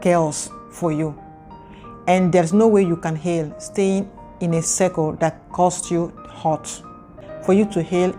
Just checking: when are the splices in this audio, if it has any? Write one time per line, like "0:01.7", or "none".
0:07.2